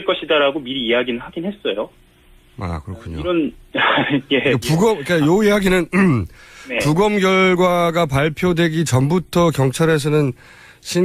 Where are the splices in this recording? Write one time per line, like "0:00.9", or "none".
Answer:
none